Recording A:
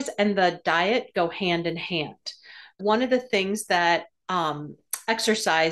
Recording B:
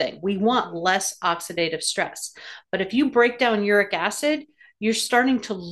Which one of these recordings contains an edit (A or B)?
A